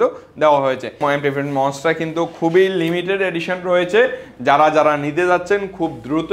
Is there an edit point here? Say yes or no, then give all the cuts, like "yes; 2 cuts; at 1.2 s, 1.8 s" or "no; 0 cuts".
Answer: yes; 1 cut; at 1.0 s